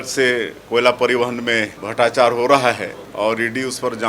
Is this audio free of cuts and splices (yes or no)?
no